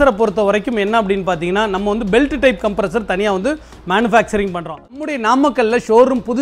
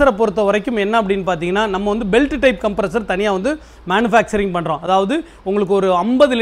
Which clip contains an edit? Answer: first; 1 cut; at 4.7 s

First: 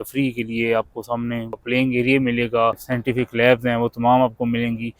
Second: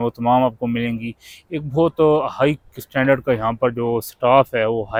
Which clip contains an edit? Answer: first; 2 cuts; at 1.5 s, 2.9 s

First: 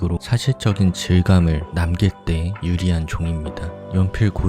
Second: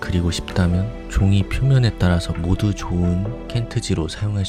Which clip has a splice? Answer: first; 1 cut; at 2.0 s

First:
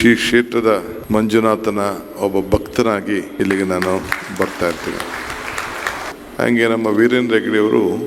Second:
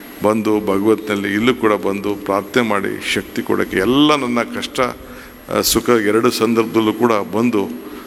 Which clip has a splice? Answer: first; 3 cuts; at 0.9 s, 3.3 s, 6.1 s

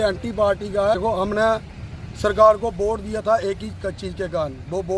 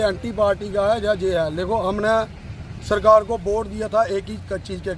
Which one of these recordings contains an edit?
first; 1 cut; at 1.0 s

